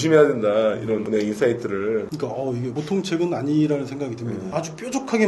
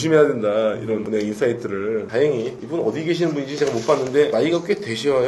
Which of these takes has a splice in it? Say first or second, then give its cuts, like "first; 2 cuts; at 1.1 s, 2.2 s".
first; 2 cuts; at 2.1 s, 4.5 s